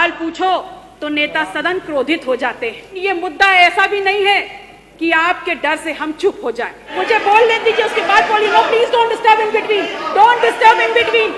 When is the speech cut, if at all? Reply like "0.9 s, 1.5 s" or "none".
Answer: 3.0 s, 6.9 s